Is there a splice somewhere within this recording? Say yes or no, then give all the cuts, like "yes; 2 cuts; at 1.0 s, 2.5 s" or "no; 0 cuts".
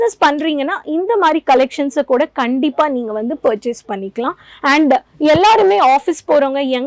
no; 0 cuts